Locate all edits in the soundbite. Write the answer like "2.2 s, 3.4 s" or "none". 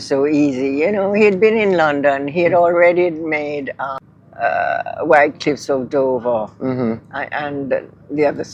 4.0 s